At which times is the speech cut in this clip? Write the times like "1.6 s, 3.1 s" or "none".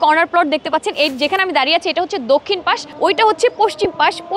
2.9 s